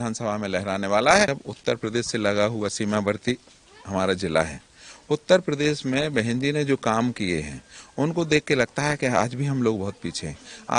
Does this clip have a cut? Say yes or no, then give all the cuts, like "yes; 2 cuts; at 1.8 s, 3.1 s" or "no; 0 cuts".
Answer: yes; 1 cut; at 1.3 s